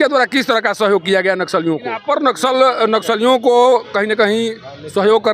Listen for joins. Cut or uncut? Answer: cut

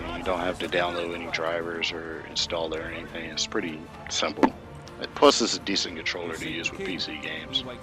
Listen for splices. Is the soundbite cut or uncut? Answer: cut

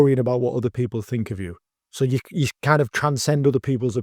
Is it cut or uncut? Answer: uncut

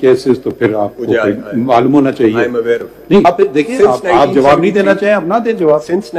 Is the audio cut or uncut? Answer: cut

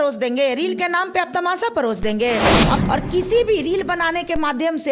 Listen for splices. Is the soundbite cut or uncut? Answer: cut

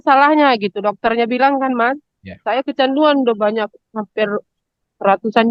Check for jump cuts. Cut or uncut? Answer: uncut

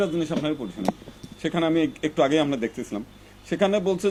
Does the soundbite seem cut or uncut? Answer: uncut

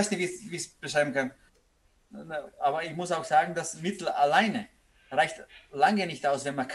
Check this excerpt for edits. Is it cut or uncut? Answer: cut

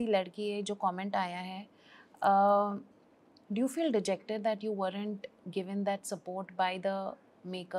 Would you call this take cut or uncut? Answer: uncut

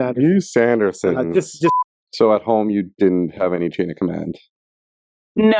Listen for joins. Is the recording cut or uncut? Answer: cut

